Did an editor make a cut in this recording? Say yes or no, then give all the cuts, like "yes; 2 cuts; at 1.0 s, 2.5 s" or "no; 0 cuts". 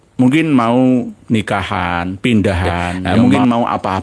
yes; 1 cut; at 3.0 s